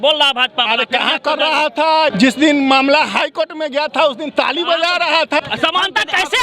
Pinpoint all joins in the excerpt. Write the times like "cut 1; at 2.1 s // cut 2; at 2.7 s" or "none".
cut 1; at 2.1 s // cut 2; at 5.4 s

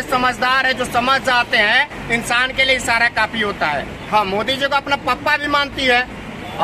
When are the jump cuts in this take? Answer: cut 1; at 4.0 s

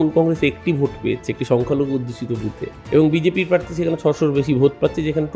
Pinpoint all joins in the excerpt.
cut 1; at 2.7 s

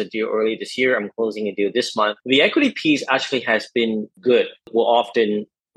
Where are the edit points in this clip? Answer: cut 1; at 2.2 s // cut 2; at 4.1 s

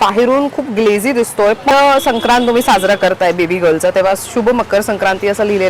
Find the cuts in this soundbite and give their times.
cut 1; at 1.7 s

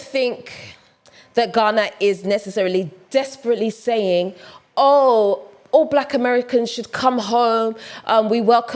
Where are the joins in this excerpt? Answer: none

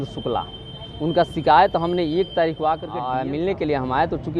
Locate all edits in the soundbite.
cut 1; at 3.0 s

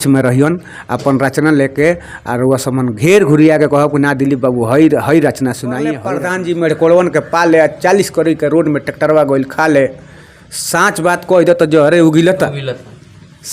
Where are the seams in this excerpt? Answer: cut 1; at 6.1 s

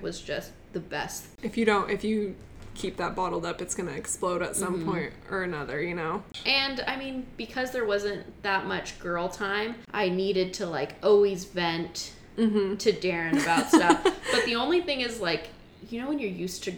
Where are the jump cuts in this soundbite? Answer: cut 1; at 1.3 s // cut 2; at 6.3 s // cut 3; at 9.8 s

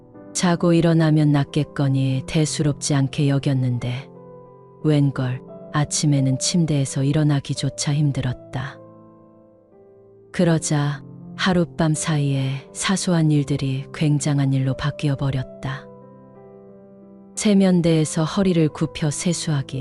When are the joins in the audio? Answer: none

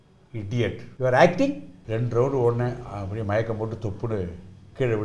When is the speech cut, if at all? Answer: cut 1; at 0.9 s // cut 2; at 1.7 s

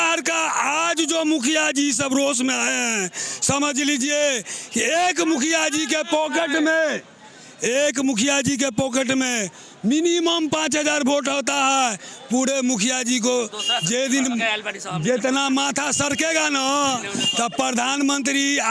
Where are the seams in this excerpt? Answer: none

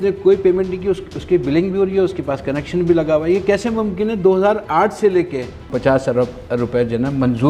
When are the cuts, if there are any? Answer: cut 1; at 5.6 s

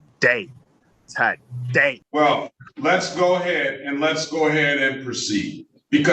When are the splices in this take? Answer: cut 1; at 2.0 s

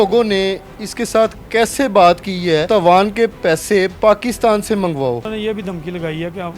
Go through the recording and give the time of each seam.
cut 1; at 2.6 s // cut 2; at 5.3 s

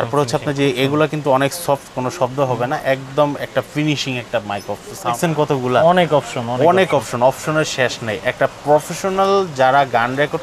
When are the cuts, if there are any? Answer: cut 1; at 5.2 s

